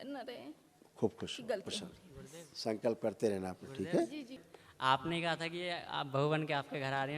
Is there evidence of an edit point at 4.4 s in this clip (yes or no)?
yes